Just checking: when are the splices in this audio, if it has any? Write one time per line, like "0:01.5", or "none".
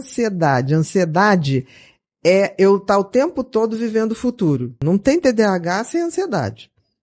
0:04.8